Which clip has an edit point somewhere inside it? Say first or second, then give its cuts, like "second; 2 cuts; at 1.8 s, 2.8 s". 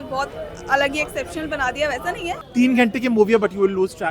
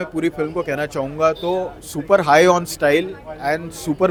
first; 1 cut; at 2.4 s